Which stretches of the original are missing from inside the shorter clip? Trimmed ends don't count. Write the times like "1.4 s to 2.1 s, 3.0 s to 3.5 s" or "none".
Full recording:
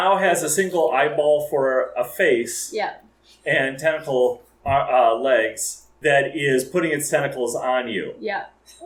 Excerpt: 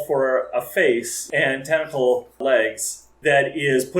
2.6 s to 3.3 s, 4.5 s to 5.2 s